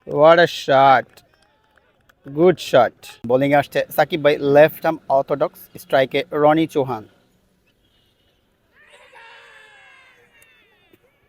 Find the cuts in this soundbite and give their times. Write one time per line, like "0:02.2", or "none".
0:03.2